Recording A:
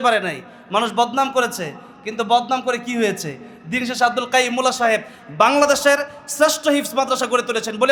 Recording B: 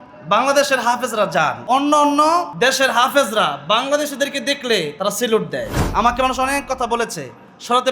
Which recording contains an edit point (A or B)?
B